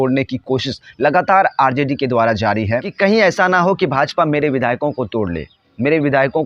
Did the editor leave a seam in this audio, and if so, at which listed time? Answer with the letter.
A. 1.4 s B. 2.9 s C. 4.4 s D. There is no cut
B